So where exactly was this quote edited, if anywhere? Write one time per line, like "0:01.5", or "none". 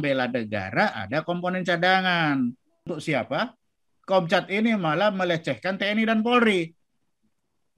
0:02.9